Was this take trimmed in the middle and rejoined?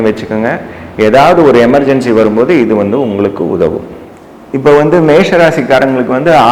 no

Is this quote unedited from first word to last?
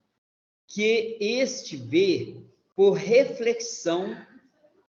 yes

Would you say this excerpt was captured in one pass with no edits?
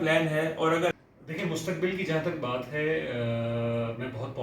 no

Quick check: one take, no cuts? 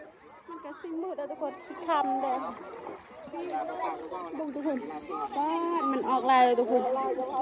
yes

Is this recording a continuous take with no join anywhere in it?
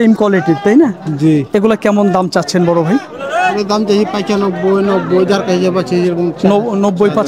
yes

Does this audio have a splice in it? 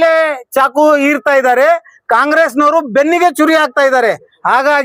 no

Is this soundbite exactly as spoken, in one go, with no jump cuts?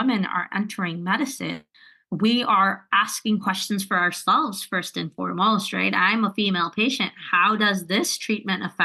yes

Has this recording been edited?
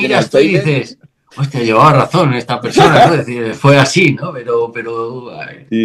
no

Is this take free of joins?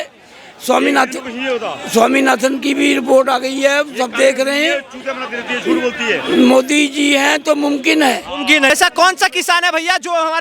no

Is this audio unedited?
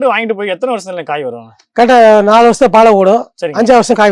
yes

